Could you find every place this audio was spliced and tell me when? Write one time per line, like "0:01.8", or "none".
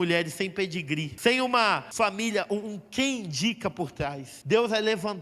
0:01.1
0:01.9
0:04.3